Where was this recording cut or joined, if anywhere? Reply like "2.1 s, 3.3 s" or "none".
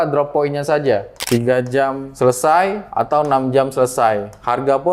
1.2 s